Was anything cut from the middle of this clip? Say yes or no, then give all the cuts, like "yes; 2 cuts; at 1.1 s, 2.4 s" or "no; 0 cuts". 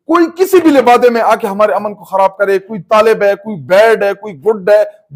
no; 0 cuts